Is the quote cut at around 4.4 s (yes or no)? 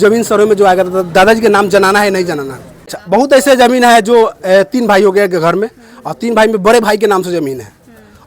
no